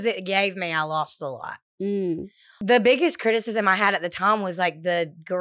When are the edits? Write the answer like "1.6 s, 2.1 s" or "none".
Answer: 2.5 s